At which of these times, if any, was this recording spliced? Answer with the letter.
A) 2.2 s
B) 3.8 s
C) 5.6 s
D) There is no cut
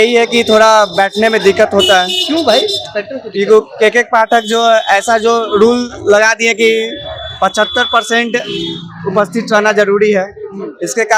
D